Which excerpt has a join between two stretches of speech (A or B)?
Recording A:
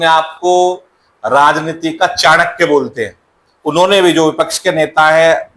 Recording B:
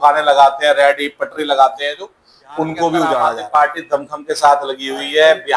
B